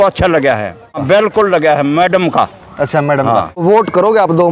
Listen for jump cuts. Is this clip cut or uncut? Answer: cut